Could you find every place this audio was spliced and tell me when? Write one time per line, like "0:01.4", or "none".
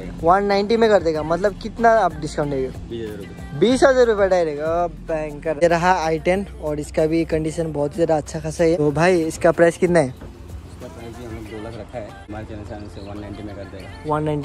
0:05.6
0:12.2